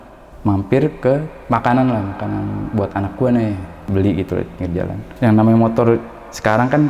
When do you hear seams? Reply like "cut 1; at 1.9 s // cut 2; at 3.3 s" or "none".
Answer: cut 1; at 3.9 s